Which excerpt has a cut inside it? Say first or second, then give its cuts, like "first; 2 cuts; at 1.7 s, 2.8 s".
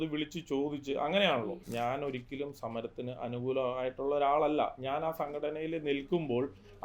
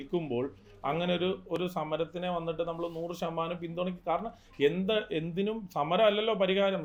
first; 1 cut; at 1.6 s